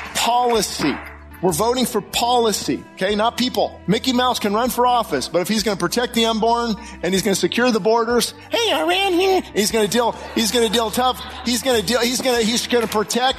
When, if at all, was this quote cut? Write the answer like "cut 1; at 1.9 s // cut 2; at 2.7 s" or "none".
cut 1; at 2.9 s // cut 2; at 3.8 s